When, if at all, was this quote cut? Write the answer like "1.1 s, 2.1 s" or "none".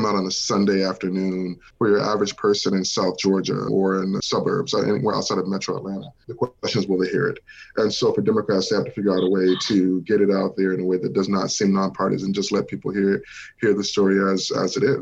1.6 s, 3.7 s, 6.2 s